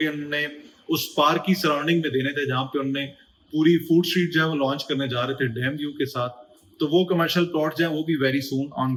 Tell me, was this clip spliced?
no; 0 cuts

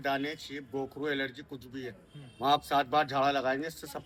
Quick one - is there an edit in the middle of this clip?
no; 0 cuts

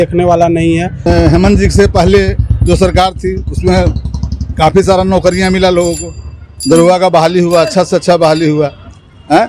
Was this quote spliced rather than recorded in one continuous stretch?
yes; 1 cut; at 1.0 s

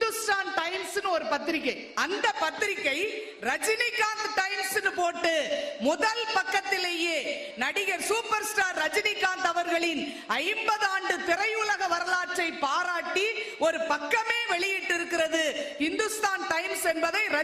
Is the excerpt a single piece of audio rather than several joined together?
no; 1 cut; at 1.9 s

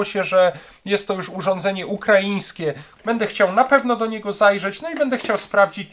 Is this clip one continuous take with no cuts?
no; 1 cut; at 2.9 s

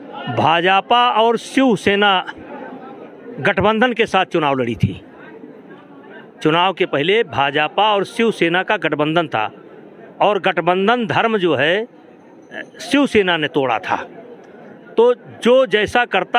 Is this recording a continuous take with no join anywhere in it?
yes; 0 cuts

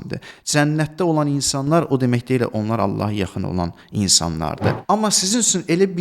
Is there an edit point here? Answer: yes; 1 cut; at 4.8 s

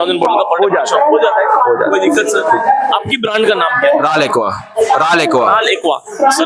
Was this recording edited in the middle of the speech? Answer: no; 0 cuts

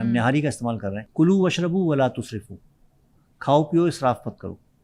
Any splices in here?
yes; 1 cut; at 1.0 s

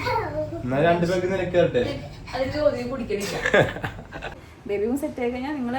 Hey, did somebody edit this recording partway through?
yes; 1 cut; at 4.5 s

